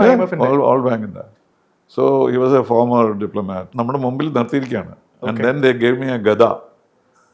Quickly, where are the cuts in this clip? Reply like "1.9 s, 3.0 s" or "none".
3.7 s